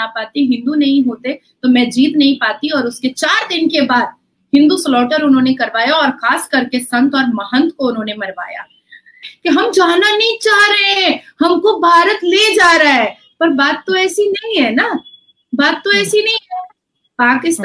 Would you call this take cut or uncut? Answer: cut